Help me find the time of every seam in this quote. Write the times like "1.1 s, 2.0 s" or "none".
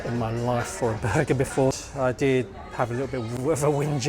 1.8 s